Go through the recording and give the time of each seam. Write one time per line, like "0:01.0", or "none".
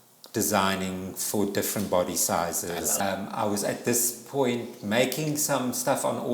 0:03.0